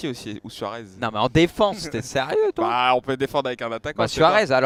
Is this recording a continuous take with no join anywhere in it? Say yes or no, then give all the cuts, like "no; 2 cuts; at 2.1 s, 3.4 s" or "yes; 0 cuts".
yes; 0 cuts